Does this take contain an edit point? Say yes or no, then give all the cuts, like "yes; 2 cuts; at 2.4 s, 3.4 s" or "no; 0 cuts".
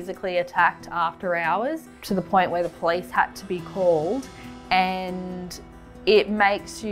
no; 0 cuts